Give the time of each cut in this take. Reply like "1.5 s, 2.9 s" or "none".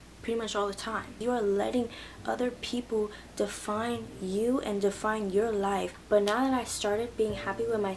1.1 s, 6.0 s